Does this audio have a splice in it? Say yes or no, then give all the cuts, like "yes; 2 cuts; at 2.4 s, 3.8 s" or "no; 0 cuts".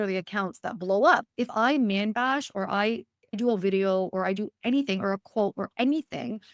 yes; 2 cuts; at 1.3 s, 3.4 s